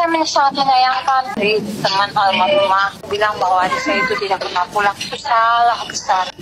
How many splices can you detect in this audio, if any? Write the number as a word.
two